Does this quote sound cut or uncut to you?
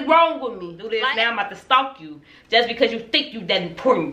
cut